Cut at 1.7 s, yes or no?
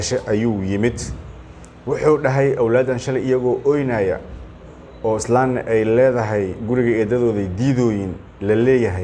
no